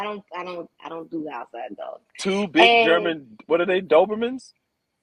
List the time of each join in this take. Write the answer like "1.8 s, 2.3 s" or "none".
none

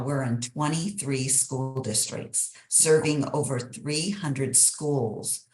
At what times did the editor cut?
none

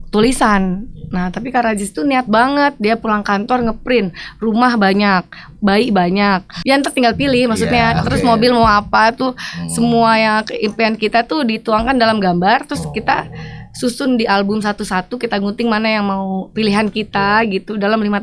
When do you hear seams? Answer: 6.5 s

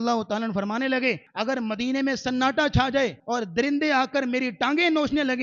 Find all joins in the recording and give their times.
1.3 s, 3.2 s

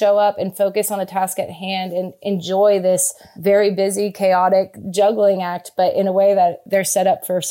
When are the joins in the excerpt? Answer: 6.6 s

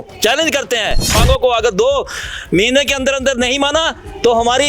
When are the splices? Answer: 1.2 s

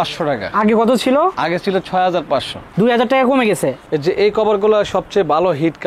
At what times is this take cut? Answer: 2.6 s, 3.8 s

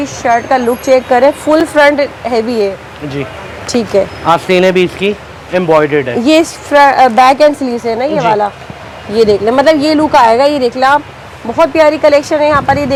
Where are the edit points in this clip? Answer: none

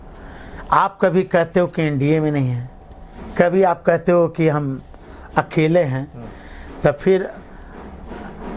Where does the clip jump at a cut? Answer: none

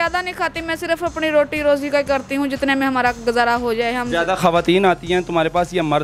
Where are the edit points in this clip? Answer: none

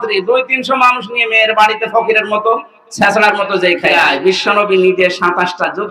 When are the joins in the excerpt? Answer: 3.9 s

